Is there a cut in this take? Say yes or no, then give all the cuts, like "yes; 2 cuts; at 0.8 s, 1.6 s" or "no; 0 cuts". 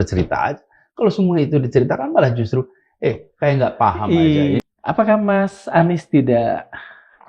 yes; 1 cut; at 4.6 s